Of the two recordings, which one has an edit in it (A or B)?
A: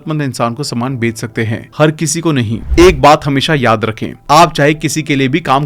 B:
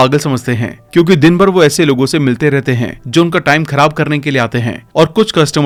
A